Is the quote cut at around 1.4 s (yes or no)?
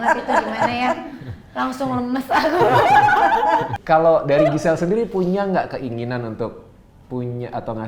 no